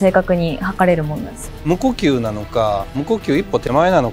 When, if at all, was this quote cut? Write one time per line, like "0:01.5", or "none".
0:01.4